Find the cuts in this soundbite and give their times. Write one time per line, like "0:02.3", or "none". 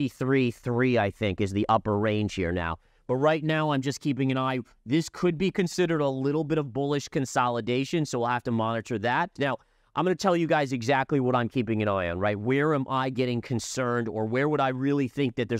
0:09.3